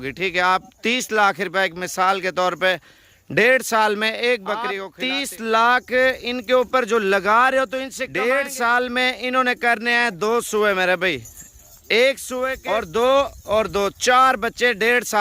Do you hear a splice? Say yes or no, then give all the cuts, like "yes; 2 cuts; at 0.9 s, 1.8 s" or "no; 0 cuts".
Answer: yes; 3 cuts; at 4.9 s, 8.0 s, 12.6 s